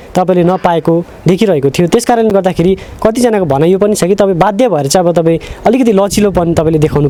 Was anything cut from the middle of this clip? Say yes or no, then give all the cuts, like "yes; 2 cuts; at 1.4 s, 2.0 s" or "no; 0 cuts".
no; 0 cuts